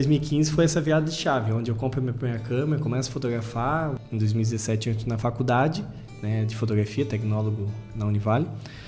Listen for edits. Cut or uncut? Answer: cut